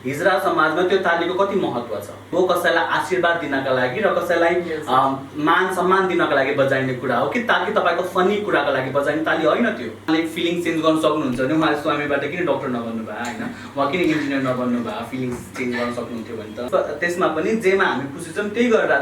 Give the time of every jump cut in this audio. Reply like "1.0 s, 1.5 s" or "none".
2.3 s, 10.1 s, 16.7 s